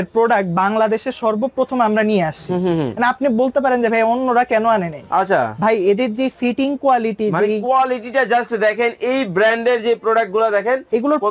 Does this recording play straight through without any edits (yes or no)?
yes